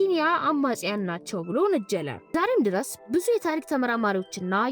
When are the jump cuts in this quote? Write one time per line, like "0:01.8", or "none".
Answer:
0:02.2